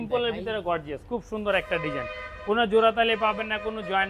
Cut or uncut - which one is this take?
uncut